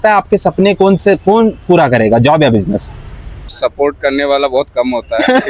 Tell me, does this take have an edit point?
yes; 1 cut; at 3.5 s

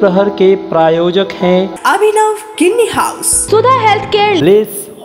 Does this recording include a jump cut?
yes; 1 cut; at 3.3 s

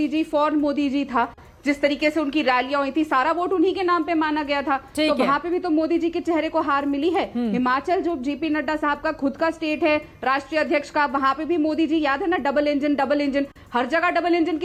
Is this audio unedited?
yes; 0 cuts

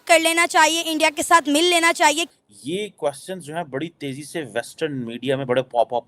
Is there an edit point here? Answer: yes; 1 cut; at 2.2 s

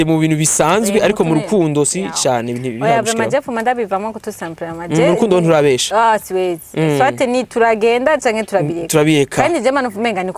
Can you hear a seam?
no; 0 cuts

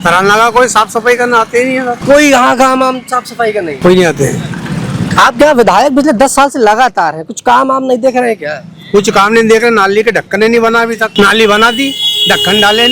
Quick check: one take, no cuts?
no; 3 cuts; at 2.0 s, 3.8 s, 11.1 s

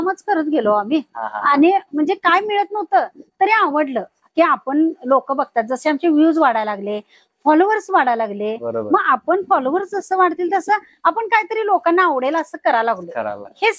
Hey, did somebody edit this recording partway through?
no; 0 cuts

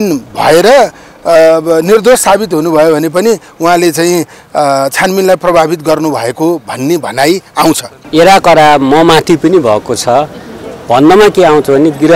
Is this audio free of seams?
no; 1 cut; at 7.9 s

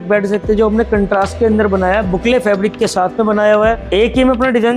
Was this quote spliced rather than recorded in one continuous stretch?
yes; 1 cut; at 3.8 s

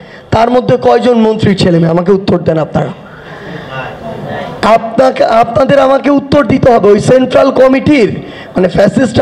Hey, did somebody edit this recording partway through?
no; 0 cuts

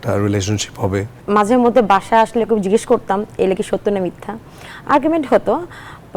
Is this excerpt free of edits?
no; 1 cut; at 1.1 s

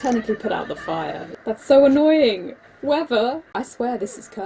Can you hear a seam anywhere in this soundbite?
yes; 2 cuts; at 1.3 s, 3.5 s

